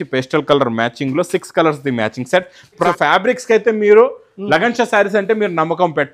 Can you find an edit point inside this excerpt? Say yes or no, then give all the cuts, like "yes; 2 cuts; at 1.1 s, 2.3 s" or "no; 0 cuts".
yes; 1 cut; at 2.8 s